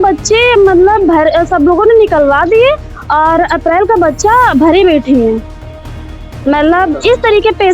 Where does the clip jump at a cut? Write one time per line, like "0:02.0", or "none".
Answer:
none